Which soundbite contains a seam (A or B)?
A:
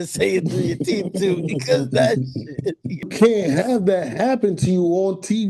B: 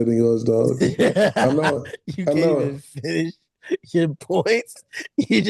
A